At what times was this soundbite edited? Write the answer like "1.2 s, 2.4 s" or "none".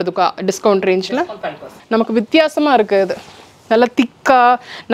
1.7 s